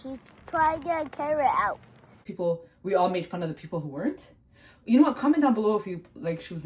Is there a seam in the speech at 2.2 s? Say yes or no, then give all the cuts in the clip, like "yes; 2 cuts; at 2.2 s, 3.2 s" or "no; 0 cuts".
yes; 1 cut; at 2.2 s